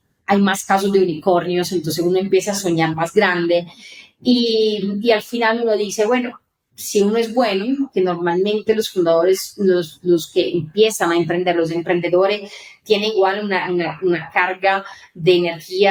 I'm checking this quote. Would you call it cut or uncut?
uncut